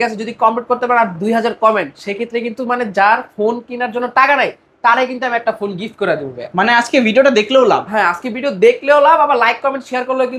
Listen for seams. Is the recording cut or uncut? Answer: uncut